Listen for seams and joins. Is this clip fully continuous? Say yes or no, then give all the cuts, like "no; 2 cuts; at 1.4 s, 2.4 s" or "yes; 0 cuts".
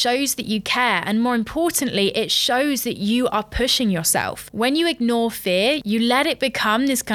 no; 1 cut; at 4.5 s